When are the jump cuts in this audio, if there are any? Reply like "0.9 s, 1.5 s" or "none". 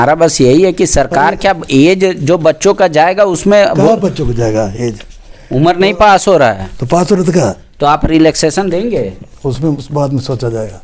none